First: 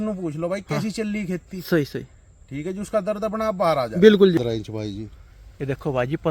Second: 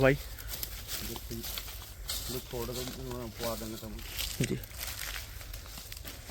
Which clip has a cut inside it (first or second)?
first